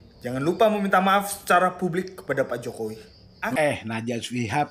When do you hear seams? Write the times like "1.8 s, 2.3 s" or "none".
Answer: 3.5 s

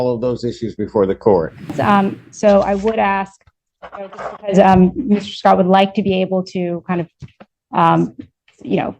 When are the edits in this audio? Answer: 1.8 s

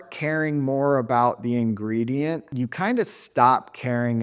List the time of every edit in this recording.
2.5 s

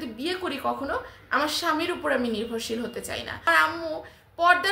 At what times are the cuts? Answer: 3.5 s

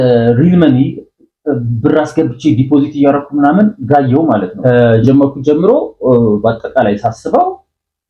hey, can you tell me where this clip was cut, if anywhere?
4.5 s

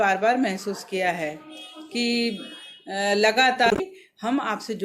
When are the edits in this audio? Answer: 3.7 s

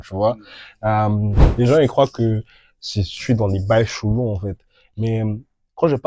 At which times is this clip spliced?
1.4 s

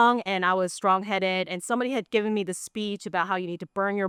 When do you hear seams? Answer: none

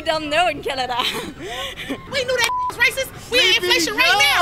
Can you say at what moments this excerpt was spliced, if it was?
2.0 s

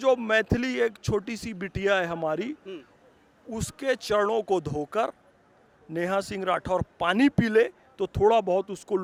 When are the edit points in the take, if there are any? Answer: none

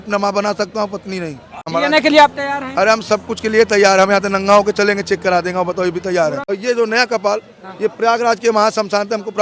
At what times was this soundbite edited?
1.6 s, 6.4 s

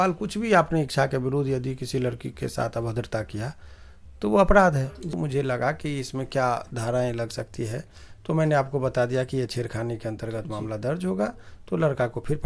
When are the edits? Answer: 5.1 s

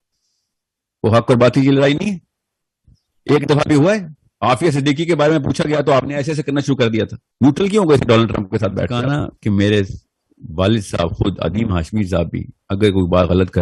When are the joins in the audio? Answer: 9.0 s

